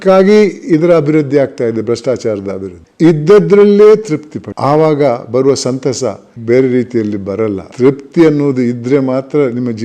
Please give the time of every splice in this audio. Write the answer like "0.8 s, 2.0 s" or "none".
2.8 s

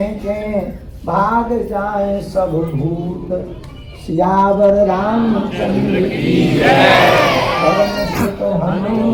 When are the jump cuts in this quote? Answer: none

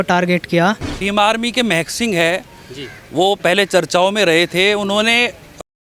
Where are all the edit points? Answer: 0.9 s

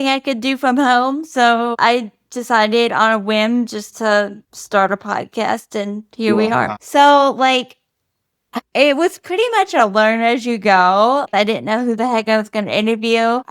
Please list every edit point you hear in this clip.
6.8 s, 11.3 s

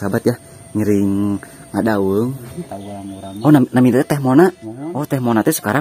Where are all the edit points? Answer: 2.8 s

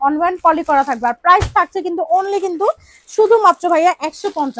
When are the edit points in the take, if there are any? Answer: none

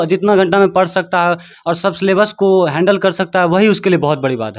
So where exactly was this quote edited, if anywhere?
none

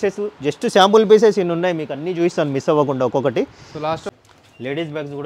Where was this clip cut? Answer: 4.0 s

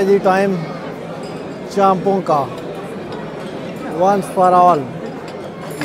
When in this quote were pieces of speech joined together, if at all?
none

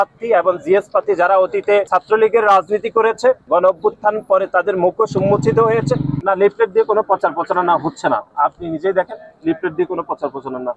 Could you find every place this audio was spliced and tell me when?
1.9 s, 3.4 s, 6.1 s

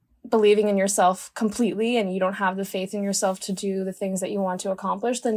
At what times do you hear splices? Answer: none

